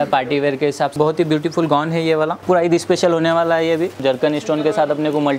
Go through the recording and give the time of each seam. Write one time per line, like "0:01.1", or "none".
0:00.9
0:02.4
0:04.0

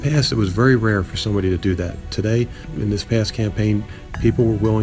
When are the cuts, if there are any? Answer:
0:02.6

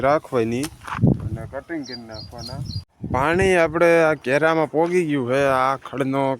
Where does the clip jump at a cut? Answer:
0:02.9

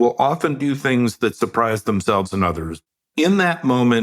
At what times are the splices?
0:02.9

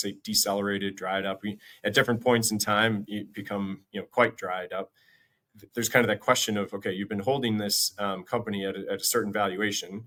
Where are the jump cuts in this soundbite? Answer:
none

